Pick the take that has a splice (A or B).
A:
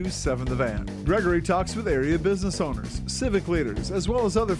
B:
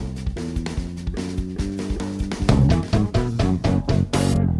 B